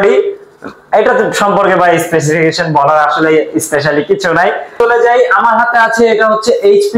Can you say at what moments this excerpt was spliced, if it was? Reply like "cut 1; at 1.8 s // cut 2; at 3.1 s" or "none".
cut 1; at 4.7 s